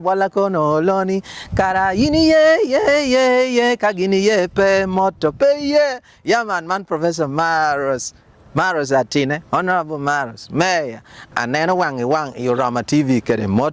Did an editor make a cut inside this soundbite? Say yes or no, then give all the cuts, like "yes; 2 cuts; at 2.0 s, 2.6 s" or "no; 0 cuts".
no; 0 cuts